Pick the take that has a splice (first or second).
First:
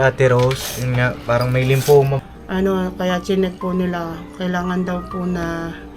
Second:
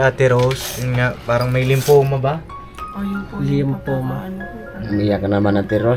first